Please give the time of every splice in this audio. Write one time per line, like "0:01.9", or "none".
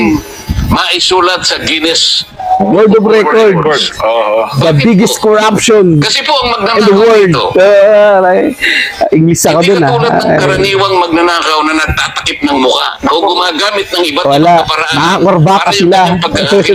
none